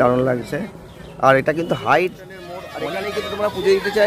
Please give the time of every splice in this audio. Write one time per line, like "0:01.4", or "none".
0:02.6